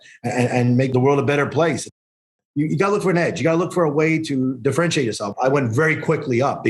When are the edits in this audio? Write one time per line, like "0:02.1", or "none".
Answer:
0:00.9
0:02.0
0:05.3

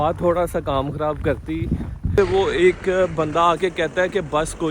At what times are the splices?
0:02.1

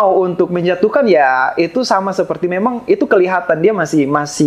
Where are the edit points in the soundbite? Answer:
none

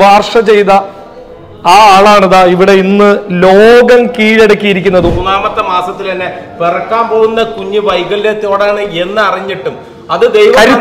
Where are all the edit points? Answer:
0:05.1

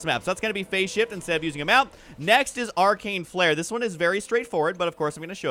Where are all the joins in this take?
none

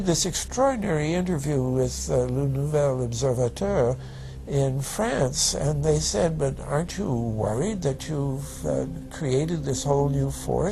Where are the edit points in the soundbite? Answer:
0:09.0

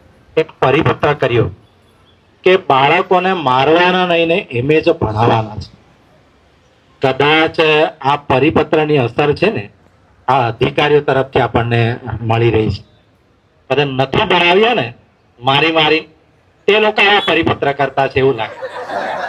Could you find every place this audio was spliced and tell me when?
none

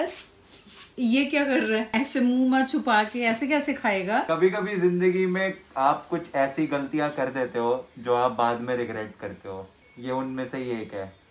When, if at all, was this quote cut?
0:01.9
0:04.2

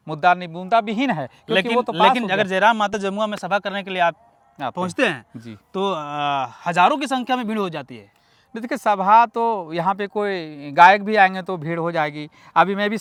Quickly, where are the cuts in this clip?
none

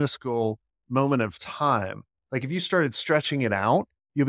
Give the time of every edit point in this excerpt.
none

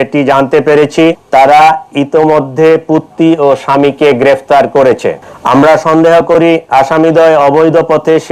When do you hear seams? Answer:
0:01.2
0:05.3

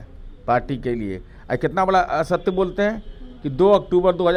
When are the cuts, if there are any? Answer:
none

